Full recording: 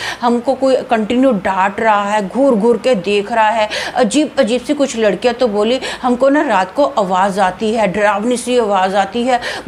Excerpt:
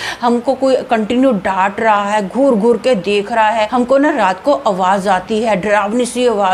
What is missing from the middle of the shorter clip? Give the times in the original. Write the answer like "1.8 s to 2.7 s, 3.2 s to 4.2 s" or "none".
3.7 s to 6.0 s